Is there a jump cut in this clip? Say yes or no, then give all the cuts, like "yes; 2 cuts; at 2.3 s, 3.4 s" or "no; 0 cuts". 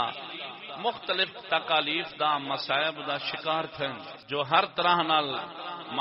yes; 1 cut; at 4.1 s